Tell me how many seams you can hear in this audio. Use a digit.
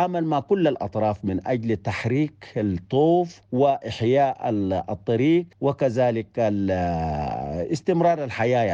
2